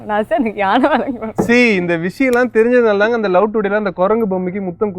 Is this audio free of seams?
yes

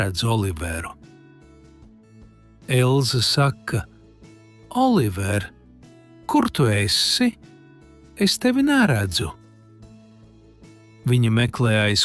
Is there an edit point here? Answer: yes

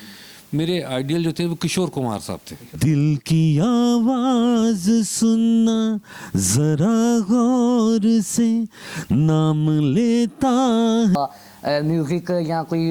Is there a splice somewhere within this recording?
yes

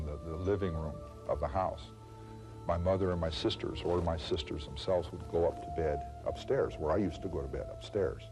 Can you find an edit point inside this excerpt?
yes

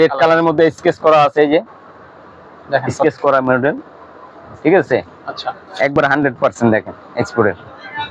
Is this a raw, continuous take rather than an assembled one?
yes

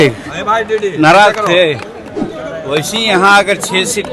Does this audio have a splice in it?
no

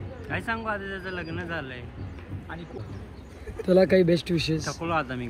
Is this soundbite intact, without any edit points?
no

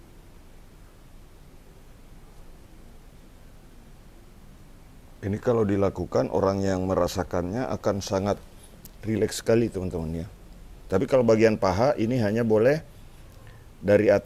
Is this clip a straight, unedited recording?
yes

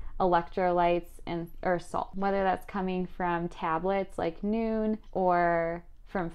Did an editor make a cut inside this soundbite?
yes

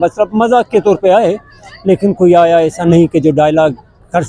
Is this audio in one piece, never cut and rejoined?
yes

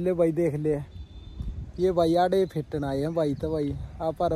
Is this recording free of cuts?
yes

